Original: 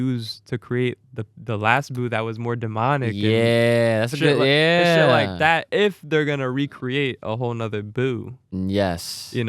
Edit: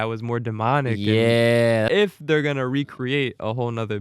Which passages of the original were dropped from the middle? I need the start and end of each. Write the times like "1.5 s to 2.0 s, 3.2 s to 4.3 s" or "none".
4.0 s to 5.7 s